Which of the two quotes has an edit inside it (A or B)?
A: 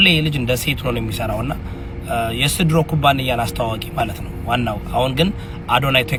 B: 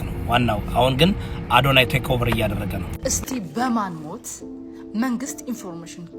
B